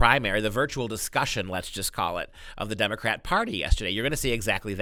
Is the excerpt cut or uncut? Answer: uncut